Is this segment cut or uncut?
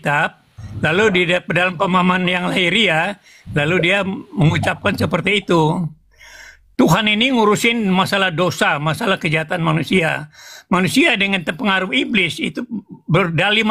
uncut